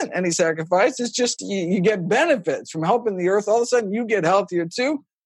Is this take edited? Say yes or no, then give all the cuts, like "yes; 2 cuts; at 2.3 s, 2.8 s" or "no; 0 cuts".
yes; 1 cut; at 1.3 s